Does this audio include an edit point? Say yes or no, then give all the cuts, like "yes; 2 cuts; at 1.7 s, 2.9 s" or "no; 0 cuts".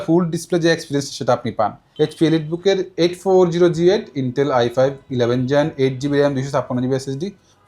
yes; 1 cut; at 1.8 s